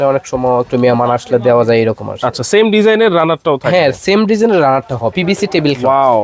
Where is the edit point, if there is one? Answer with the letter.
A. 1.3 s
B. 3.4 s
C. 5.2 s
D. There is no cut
C